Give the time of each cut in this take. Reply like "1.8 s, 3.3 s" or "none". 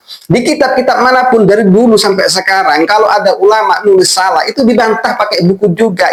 none